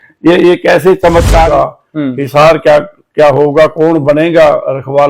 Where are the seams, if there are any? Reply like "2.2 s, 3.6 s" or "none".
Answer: 1.5 s